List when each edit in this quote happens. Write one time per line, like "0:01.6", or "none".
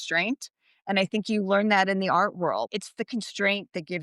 0:02.7

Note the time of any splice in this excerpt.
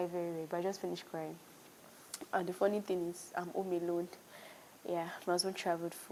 none

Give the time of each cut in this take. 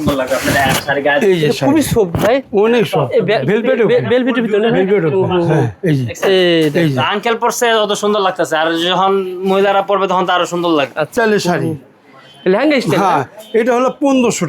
0:11.1

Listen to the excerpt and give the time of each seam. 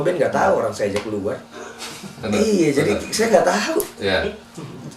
0:02.2

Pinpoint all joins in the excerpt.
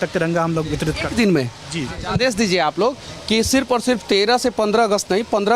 0:02.0

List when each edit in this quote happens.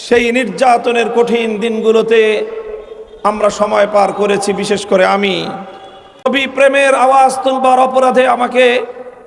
0:06.2

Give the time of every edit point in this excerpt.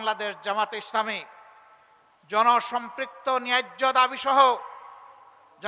none

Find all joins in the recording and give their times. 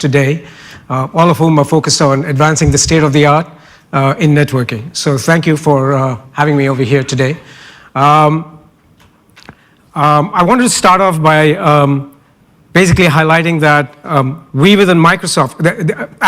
0:14.0

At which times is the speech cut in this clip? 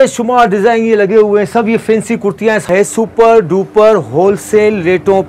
0:02.7

